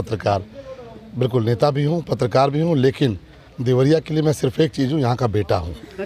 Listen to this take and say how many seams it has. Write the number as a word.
zero